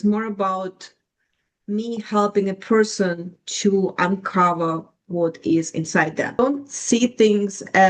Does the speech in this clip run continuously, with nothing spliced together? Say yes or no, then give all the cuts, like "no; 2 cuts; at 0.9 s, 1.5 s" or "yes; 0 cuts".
no; 1 cut; at 6.4 s